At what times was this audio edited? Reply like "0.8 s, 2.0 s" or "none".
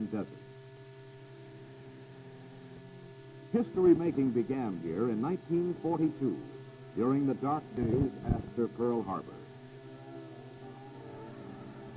8.7 s